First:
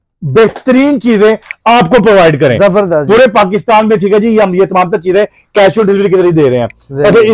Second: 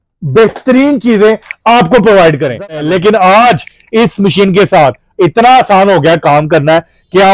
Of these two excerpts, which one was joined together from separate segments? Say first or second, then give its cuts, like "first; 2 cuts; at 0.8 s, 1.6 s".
second; 1 cut; at 2.7 s